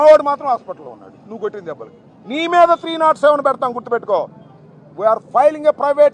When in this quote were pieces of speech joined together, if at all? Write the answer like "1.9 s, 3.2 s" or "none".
none